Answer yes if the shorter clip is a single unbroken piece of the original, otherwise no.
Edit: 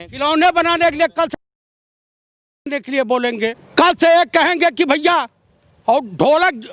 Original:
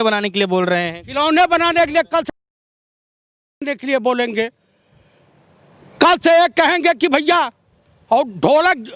no